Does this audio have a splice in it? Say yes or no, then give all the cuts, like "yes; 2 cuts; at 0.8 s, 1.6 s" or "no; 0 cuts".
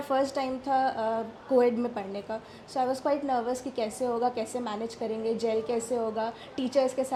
no; 0 cuts